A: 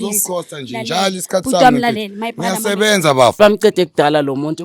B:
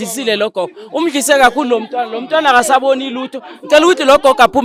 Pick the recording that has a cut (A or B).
A